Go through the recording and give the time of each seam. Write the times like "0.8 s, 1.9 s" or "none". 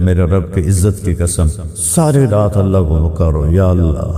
none